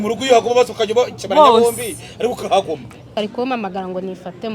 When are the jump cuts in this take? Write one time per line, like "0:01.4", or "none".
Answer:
0:03.1